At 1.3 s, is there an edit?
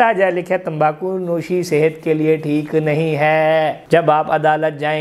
no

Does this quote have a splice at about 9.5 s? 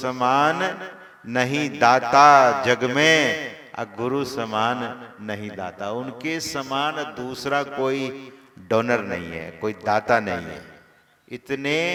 no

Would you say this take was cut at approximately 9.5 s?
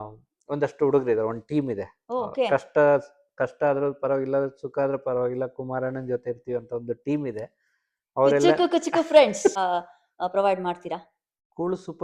yes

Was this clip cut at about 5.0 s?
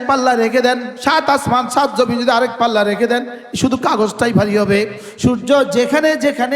yes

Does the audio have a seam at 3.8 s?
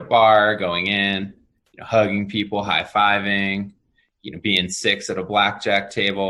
no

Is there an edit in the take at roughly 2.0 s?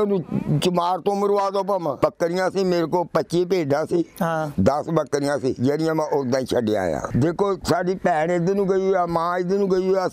yes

